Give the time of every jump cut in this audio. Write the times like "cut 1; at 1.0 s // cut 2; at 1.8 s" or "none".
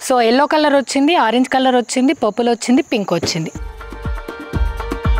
cut 1; at 3.6 s